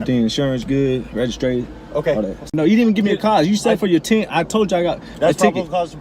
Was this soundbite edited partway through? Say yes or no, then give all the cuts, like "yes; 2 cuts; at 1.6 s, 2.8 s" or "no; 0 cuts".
yes; 1 cut; at 2.5 s